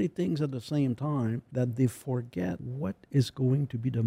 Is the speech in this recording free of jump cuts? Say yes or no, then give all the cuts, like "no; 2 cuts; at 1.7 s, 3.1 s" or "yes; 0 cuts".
no; 2 cuts; at 1.4 s, 2.7 s